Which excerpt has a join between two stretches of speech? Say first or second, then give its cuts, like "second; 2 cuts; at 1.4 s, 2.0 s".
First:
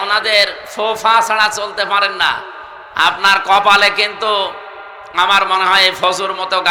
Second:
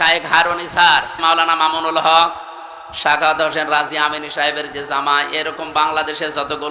second; 1 cut; at 1.1 s